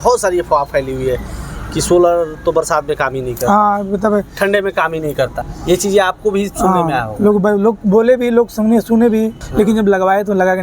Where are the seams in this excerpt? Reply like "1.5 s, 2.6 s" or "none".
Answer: 5.4 s, 9.4 s

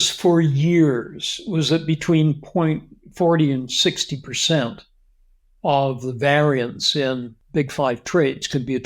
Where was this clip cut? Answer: 7.3 s

